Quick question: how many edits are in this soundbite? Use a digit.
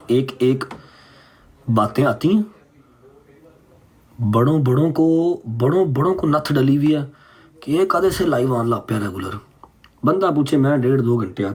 0